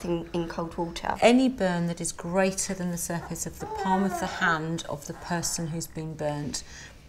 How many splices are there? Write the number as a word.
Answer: one